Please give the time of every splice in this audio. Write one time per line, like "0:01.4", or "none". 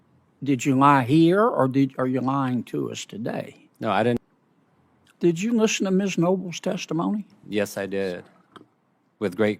0:04.2